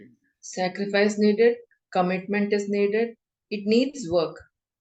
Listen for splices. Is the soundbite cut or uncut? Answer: uncut